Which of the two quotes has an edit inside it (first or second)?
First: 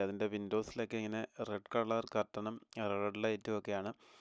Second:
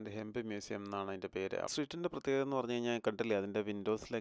second